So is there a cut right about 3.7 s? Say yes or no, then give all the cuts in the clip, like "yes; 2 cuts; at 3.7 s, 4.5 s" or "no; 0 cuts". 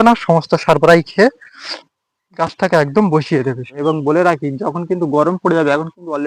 yes; 1 cut; at 3.7 s